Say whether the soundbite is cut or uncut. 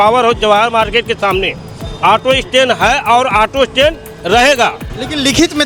uncut